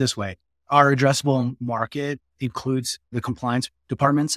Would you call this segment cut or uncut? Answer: cut